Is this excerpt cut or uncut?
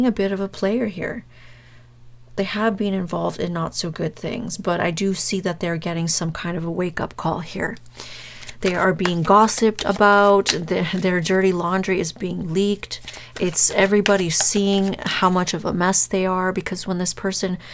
uncut